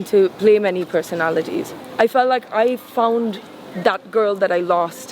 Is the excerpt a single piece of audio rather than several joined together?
no; 1 cut; at 1.8 s

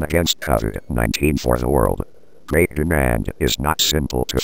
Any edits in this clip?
no; 0 cuts

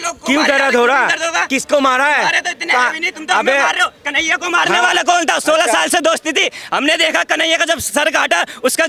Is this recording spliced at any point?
no; 0 cuts

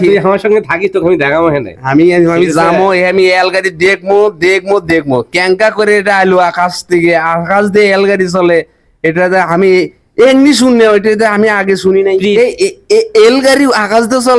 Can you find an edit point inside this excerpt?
yes; 1 cut; at 12.3 s

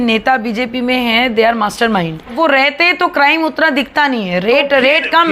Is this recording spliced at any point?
yes; 1 cut; at 2.3 s

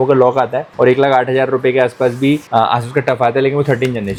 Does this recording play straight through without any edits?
yes; 0 cuts

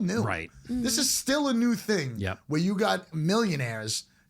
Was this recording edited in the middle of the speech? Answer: yes; 1 cut; at 3.1 s

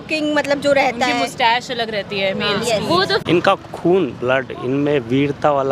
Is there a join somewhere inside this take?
yes; 1 cut; at 3.2 s

